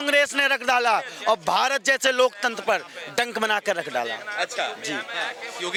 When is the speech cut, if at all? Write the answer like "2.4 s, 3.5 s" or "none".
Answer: none